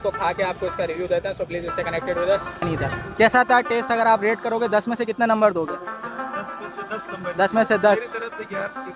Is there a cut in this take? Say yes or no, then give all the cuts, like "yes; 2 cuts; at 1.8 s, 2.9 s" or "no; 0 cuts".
yes; 1 cut; at 2.6 s